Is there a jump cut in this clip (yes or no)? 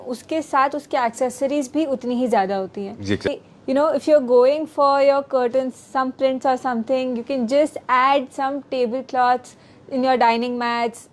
yes